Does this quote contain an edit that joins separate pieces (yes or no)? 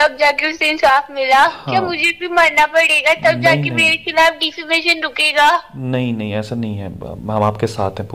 no